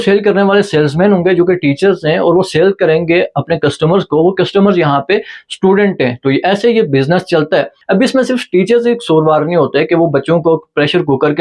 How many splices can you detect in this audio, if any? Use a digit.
1